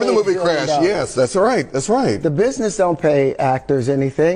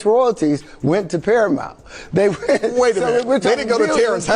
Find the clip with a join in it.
second; 1 cut; at 2.3 s

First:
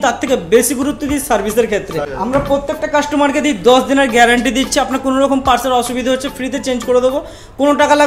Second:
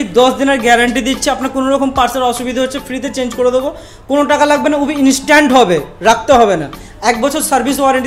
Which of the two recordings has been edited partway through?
first; 1 cut; at 2.1 s

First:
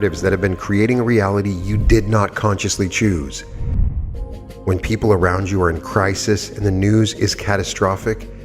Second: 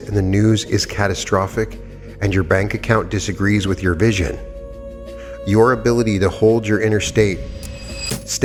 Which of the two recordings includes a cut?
first; 1 cut; at 3.9 s

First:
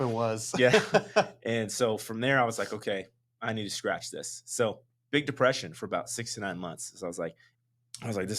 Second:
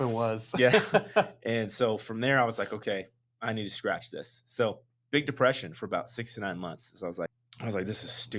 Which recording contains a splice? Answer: second; 1 cut; at 7.4 s

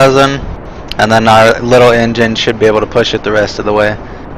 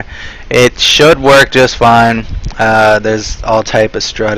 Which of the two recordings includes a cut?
first; 1 cut; at 2.9 s

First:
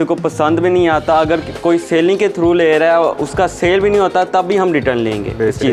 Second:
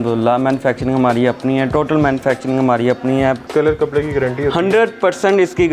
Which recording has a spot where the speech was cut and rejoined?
second; 1 cut; at 3.4 s

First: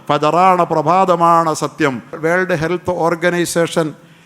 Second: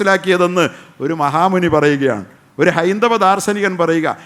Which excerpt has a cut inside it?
first; 1 cut; at 2.2 s

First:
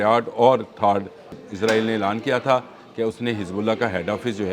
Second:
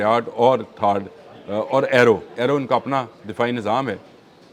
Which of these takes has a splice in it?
first; 1 cut; at 1.4 s

